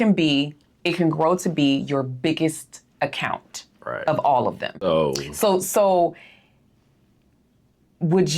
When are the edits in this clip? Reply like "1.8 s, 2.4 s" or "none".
4.8 s